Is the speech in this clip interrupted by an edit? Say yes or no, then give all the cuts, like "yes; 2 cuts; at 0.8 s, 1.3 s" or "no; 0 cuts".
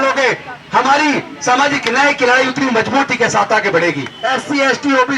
yes; 1 cut; at 4.1 s